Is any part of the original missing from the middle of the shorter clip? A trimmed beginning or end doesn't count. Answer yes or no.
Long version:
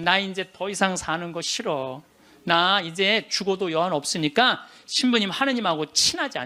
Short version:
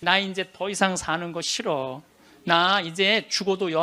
no